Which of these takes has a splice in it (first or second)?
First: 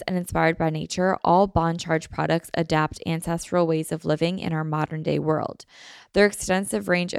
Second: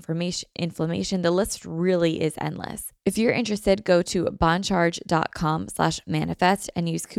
second